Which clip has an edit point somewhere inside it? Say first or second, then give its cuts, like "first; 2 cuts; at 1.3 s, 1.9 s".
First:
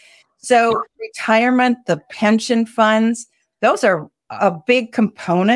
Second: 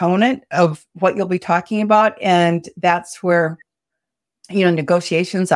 first; 2 cuts; at 1.1 s, 4.2 s